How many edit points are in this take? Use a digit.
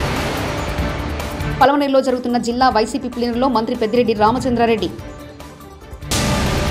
1